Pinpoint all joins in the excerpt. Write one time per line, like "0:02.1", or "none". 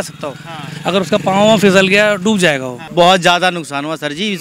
0:02.8